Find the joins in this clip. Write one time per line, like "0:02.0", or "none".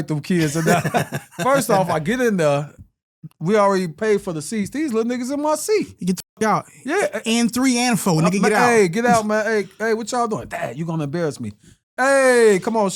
none